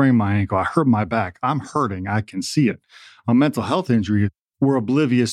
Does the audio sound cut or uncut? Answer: cut